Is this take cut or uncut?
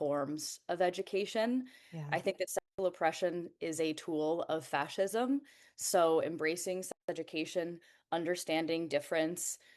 uncut